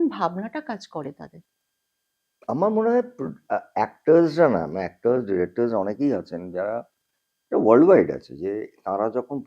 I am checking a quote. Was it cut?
no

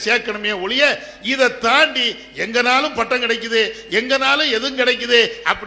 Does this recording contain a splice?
no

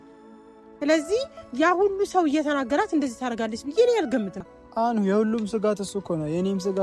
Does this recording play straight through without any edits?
no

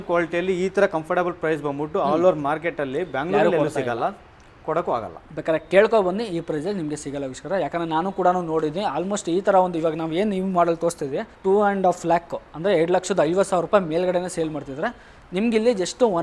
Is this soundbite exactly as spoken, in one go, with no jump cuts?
yes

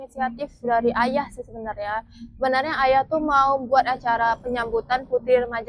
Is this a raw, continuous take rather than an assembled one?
yes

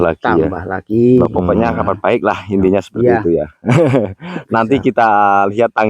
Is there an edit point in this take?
yes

